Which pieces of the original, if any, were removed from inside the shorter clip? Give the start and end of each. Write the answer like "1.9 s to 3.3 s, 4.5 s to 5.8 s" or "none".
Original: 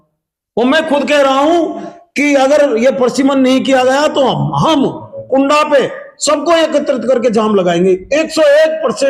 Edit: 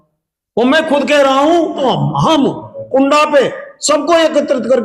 1.8 s to 4.2 s